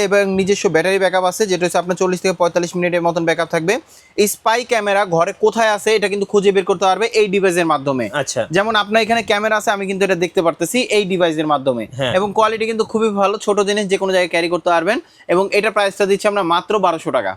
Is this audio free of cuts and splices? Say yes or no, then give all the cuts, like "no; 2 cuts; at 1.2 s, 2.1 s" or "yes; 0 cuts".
yes; 0 cuts